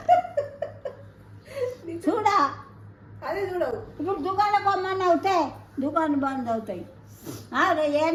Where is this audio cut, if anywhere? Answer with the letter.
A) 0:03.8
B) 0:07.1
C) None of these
C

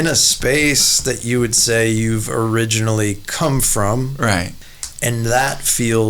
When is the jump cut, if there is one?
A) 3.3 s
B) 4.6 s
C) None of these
B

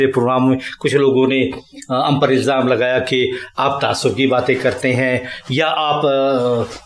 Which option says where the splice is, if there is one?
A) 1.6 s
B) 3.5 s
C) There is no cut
C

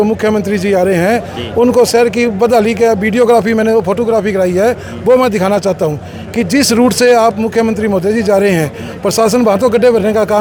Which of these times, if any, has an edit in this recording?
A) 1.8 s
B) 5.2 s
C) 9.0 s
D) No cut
D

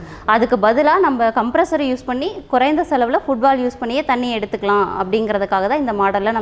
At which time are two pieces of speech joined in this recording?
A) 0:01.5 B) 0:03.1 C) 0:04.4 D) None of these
D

